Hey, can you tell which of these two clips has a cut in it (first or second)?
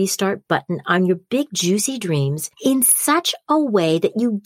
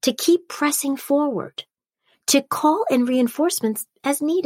first